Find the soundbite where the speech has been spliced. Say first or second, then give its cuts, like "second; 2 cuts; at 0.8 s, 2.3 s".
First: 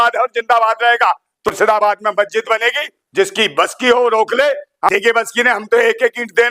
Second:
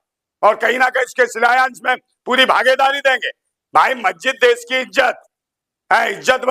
first; 2 cuts; at 1.5 s, 4.9 s